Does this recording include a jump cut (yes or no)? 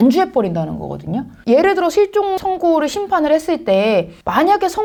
no